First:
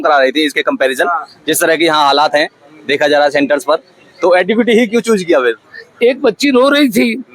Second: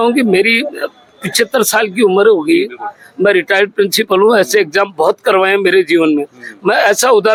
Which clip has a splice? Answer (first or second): first